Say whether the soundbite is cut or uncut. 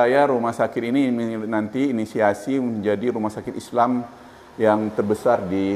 uncut